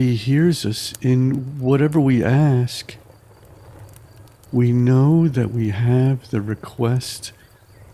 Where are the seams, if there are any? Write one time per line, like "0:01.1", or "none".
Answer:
none

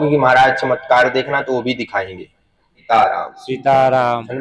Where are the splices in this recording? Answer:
0:02.8

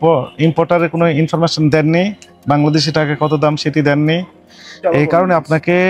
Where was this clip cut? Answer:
none

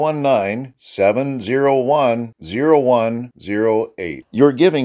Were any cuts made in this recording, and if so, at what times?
none

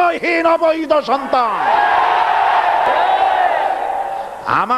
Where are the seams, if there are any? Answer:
0:02.9

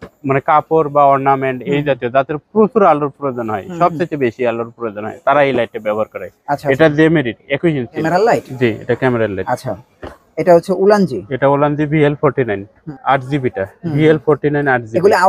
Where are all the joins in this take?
0:08.0
0:12.9

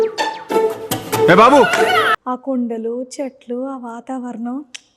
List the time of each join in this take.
0:02.0

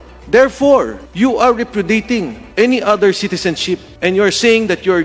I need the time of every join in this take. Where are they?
0:01.0
0:02.4
0:03.9

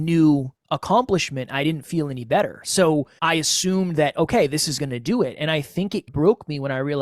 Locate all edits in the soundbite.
0:03.1

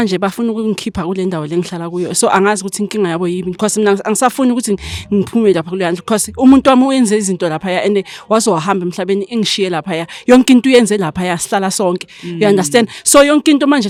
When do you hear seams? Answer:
none

